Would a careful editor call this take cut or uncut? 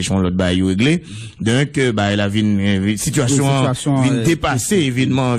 uncut